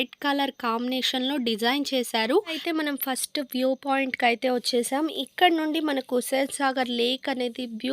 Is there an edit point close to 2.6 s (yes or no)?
yes